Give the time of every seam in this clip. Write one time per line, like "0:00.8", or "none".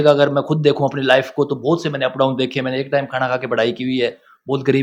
none